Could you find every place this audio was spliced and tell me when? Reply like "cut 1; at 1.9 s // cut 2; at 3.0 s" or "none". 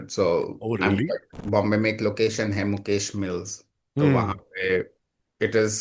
cut 1; at 1.4 s